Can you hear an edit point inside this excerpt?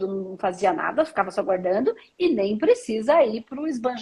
no; 0 cuts

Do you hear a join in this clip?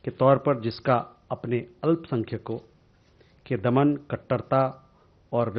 no; 0 cuts

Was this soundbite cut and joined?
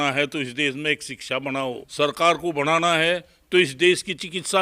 yes; 1 cut; at 1.8 s

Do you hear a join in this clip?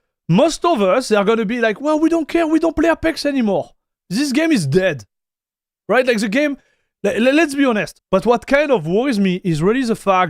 yes; 1 cut; at 7.9 s

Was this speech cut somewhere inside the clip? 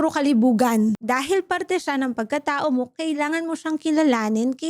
yes; 1 cut; at 1.0 s

